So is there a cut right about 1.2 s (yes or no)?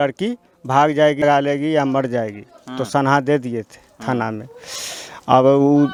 no